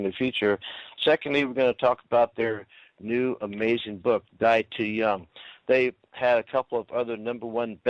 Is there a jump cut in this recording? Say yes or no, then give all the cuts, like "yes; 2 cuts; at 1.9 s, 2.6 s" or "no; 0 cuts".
yes; 1 cut; at 6.1 s